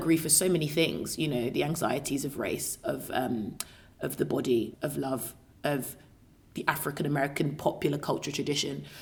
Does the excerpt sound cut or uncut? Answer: uncut